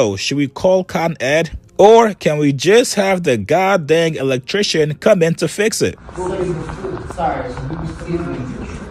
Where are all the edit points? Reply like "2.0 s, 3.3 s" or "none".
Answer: none

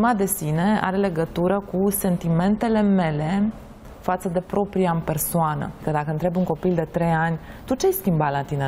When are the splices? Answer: 5.8 s

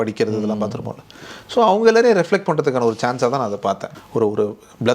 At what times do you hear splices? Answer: 3.9 s

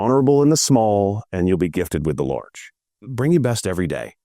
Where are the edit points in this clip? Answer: 3.0 s

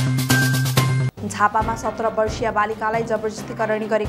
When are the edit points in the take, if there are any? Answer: 1.0 s

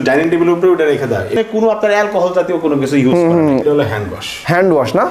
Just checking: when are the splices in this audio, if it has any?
1.6 s, 3.6 s

